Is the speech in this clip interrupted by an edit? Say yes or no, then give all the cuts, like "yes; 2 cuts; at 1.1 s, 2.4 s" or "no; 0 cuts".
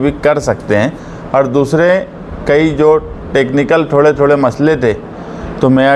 no; 0 cuts